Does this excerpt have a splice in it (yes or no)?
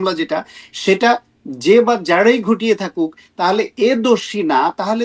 no